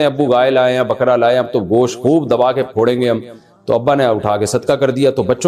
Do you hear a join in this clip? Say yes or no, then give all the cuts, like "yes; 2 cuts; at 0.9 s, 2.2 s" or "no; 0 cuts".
no; 0 cuts